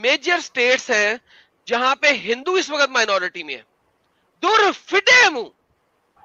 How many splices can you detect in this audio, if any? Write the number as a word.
zero